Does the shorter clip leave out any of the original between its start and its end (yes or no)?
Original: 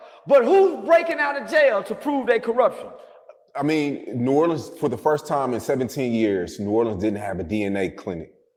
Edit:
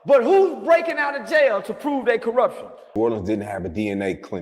yes